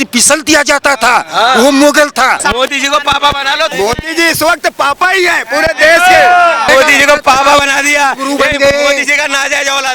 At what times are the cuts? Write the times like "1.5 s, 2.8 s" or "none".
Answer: 2.4 s, 3.7 s, 6.7 s